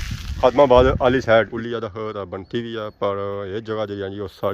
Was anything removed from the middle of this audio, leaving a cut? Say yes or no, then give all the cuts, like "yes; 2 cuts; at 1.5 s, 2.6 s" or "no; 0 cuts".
yes; 1 cut; at 1.6 s